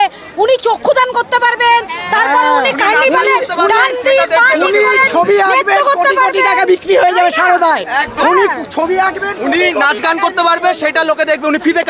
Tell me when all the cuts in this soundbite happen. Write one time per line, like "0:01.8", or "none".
none

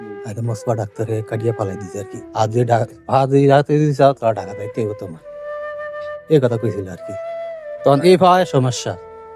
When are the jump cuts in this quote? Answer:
0:02.2

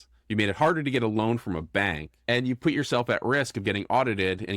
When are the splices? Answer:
0:02.1

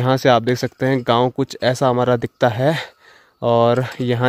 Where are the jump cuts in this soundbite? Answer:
none

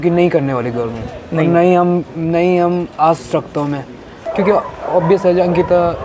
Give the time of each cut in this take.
0:04.3

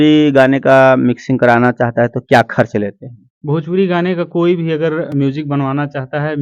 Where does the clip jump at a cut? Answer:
none

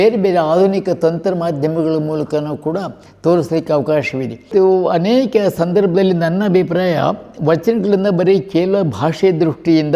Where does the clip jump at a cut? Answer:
0:04.5

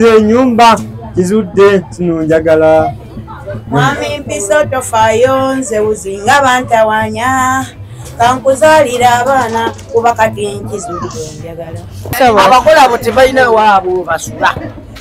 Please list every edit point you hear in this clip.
0:12.1

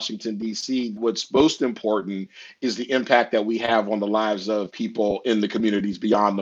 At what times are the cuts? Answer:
0:01.0
0:04.7

